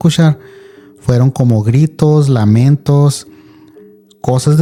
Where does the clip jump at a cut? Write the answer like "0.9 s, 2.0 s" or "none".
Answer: none